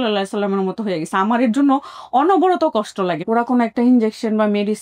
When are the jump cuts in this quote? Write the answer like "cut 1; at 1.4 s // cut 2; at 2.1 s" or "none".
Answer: cut 1; at 3.2 s